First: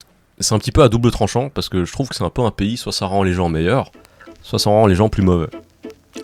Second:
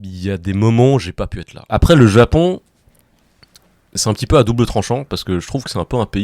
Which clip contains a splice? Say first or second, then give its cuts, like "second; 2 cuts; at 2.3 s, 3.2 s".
second; 1 cut; at 1.6 s